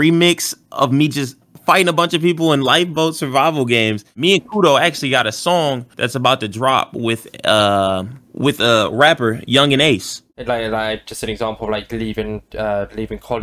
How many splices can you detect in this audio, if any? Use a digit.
2